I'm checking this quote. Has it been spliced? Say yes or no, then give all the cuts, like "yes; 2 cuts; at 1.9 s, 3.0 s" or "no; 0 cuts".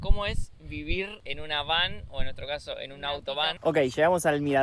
yes; 1 cut; at 3.5 s